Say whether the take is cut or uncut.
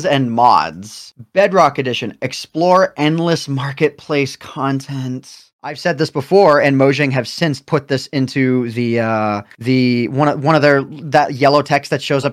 cut